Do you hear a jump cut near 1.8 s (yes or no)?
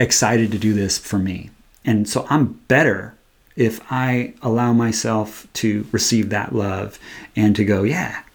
yes